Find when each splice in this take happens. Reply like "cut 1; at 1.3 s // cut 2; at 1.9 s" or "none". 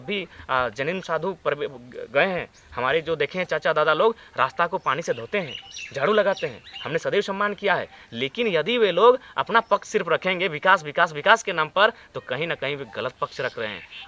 none